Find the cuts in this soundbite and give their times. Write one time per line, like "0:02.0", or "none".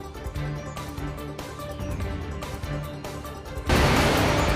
0:03.7